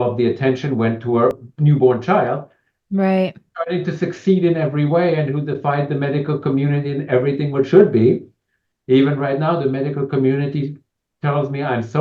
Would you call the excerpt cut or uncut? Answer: cut